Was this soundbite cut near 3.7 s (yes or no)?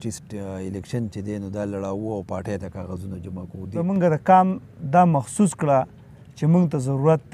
yes